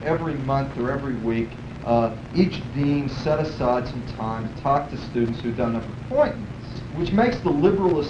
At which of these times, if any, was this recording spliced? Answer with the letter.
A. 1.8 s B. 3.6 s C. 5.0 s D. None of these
D